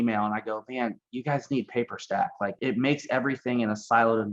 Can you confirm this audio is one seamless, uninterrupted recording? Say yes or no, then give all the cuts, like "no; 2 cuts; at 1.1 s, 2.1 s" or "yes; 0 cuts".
no; 1 cut; at 2.5 s